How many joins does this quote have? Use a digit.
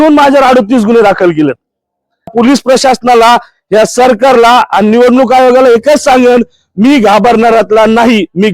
1